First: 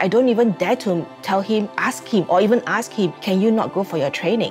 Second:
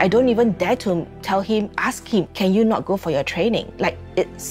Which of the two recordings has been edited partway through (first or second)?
second